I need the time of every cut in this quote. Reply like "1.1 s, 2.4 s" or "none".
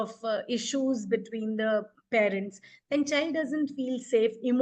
none